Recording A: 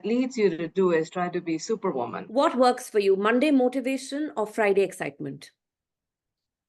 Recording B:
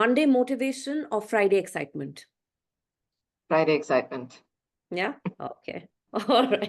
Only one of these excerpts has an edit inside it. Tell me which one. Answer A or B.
A